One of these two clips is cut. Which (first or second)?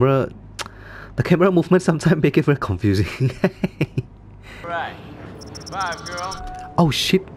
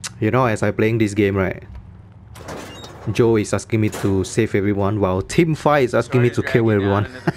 first